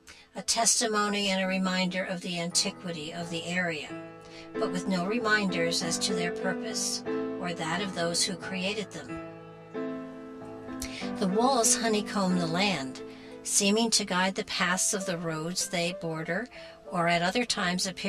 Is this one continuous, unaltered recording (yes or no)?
no